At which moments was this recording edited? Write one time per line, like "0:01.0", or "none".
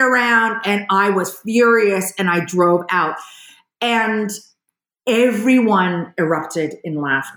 none